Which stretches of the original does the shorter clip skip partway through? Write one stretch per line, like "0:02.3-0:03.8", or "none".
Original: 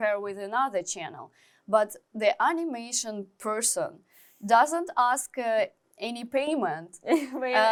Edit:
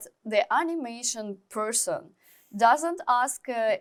none